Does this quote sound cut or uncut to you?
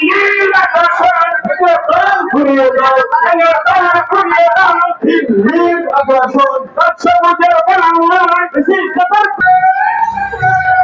uncut